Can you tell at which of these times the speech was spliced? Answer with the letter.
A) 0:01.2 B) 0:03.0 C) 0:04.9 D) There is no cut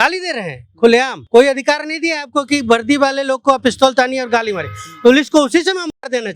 A